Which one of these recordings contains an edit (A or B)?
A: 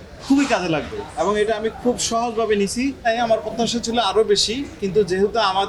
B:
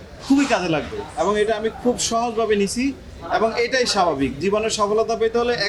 A